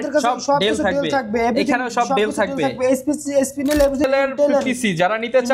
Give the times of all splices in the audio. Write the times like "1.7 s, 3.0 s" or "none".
4.0 s